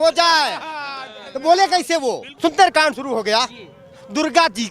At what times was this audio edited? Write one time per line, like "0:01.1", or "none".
0:02.3